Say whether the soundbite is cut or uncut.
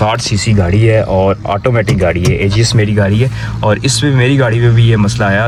uncut